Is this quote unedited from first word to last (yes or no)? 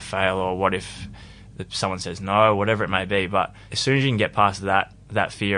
yes